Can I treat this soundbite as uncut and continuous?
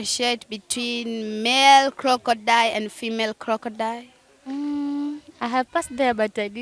yes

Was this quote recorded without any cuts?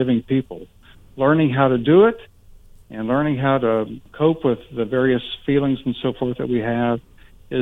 no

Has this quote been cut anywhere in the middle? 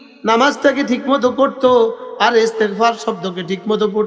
no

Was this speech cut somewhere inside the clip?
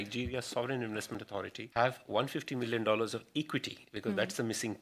yes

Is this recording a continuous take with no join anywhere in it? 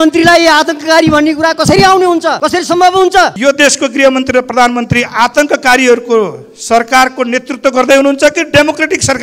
no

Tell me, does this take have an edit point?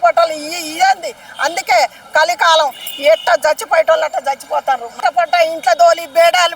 yes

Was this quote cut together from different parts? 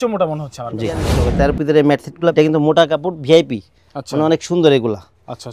yes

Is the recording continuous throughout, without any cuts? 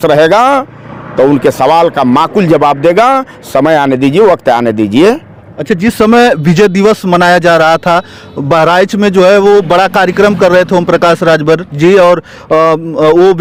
yes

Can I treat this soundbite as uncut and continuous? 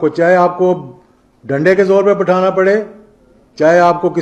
yes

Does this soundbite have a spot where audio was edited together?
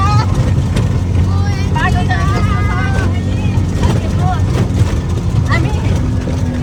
no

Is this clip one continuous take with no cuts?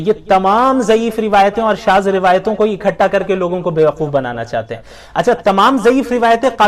yes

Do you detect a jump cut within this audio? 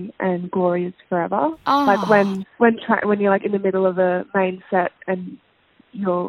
no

